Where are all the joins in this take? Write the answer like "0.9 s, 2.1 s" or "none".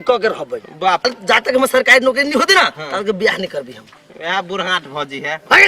1.0 s